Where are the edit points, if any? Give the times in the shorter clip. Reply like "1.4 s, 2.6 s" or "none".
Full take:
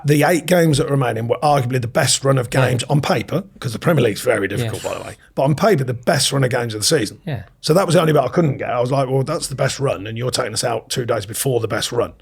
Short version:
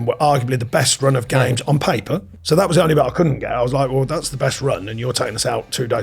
2.3 s